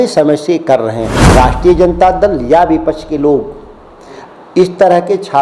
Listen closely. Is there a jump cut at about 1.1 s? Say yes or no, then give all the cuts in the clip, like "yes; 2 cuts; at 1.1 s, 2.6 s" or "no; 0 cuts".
yes; 1 cut; at 1.1 s